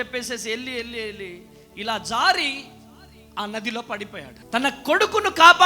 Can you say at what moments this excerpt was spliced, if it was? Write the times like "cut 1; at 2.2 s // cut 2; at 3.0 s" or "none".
cut 1; at 4.4 s